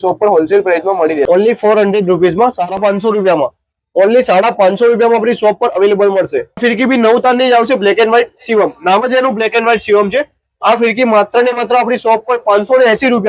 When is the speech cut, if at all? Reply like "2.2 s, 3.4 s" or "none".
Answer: 1.3 s, 2.8 s, 6.6 s